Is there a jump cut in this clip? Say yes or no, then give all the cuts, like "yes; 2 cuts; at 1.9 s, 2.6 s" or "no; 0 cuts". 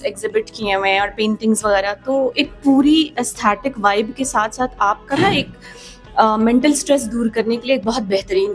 no; 0 cuts